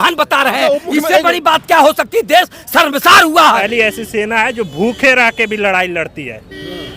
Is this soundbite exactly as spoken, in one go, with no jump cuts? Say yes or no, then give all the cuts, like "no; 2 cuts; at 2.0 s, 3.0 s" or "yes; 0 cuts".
no; 1 cut; at 3.7 s